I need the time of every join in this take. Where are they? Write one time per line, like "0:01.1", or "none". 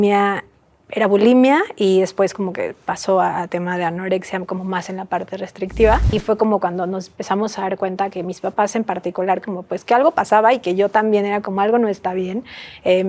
0:06.1